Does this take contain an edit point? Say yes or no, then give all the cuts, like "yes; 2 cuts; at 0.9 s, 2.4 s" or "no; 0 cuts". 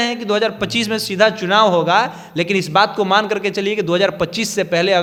no; 0 cuts